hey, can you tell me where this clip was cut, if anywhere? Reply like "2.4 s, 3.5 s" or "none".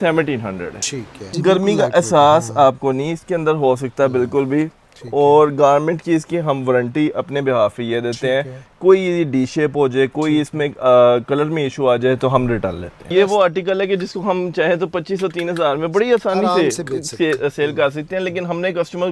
1.3 s, 13.1 s